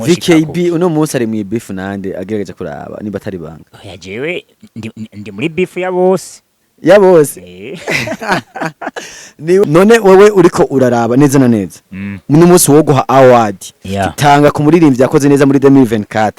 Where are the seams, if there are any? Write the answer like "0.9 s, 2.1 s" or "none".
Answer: 9.6 s

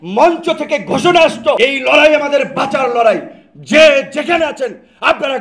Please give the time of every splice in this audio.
1.6 s

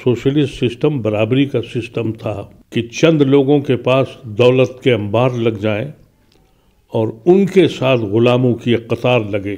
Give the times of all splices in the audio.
2.5 s

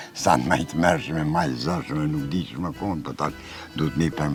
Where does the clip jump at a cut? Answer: none

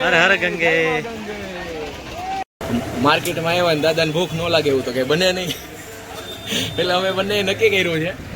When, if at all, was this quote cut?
2.4 s

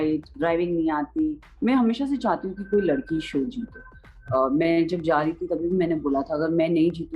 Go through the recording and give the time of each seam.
1.5 s

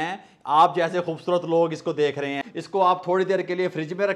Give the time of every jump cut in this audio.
2.4 s

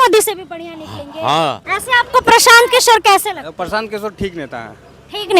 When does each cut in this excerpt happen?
1.7 s

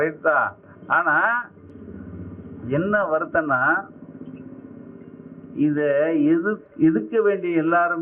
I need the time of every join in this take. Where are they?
none

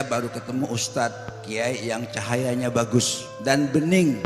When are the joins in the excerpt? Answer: 3.2 s

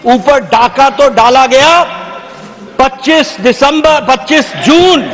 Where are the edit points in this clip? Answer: none

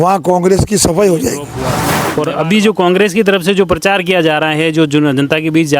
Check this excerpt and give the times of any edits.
2.0 s

